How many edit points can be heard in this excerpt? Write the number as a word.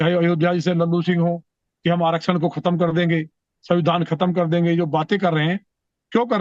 zero